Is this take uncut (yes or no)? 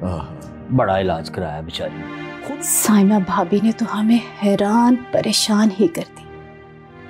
no